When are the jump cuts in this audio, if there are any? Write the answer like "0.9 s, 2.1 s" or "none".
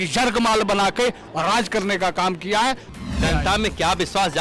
3.0 s

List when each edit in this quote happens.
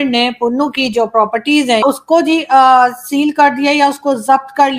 1.8 s

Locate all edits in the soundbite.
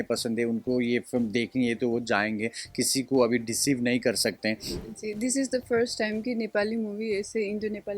4.7 s

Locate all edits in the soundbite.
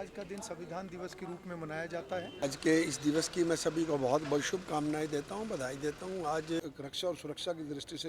2.4 s, 6.6 s

